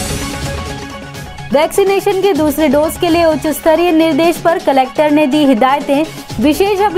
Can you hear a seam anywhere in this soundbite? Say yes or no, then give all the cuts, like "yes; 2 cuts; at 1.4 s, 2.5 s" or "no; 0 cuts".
no; 0 cuts